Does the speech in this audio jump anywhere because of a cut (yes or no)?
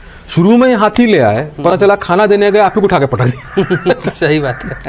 no